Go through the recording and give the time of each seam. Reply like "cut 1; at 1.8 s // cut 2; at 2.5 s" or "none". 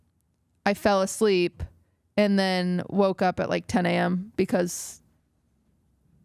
none